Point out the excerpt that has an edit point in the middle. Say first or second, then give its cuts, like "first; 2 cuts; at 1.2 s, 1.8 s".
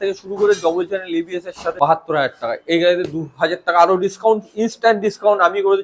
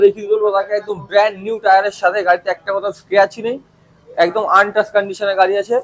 first; 1 cut; at 1.7 s